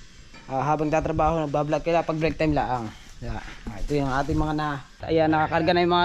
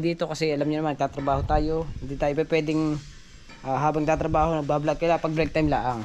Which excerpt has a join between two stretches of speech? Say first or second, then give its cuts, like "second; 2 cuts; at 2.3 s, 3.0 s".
first; 1 cut; at 5.0 s